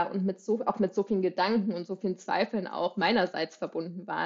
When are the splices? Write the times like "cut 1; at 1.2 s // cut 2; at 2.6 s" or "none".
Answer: none